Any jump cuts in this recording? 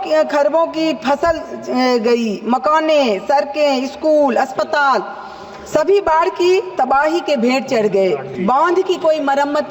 yes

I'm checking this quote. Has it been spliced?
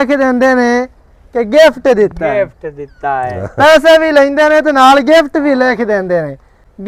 no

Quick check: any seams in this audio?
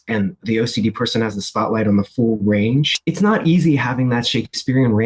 yes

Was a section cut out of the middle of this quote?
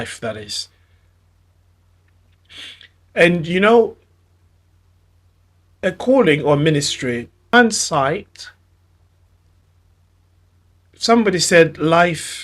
yes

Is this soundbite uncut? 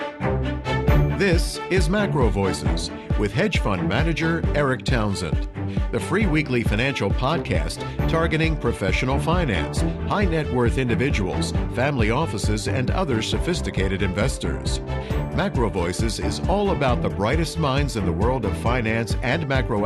yes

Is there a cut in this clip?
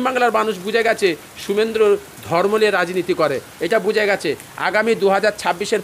no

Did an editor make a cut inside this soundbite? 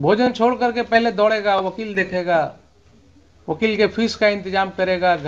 no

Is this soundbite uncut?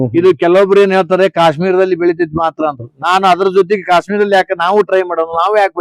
yes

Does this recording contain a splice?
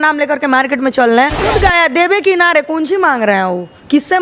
yes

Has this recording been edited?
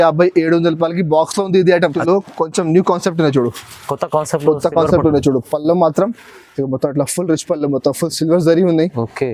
yes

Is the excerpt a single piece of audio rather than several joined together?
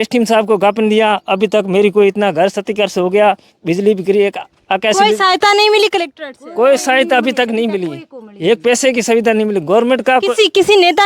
yes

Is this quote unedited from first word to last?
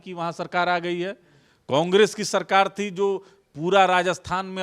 yes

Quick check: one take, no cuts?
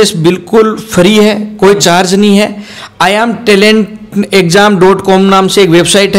yes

